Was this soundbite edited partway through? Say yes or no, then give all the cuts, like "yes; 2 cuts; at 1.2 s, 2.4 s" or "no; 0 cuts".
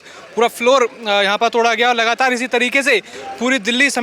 no; 0 cuts